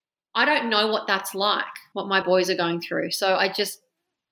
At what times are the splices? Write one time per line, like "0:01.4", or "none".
0:02.0